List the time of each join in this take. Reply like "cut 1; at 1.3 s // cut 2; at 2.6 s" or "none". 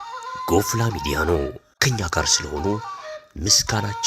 cut 1; at 1.7 s